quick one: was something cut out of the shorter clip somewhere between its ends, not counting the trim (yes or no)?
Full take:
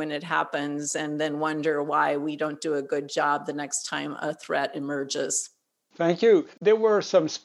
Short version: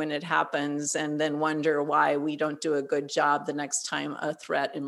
no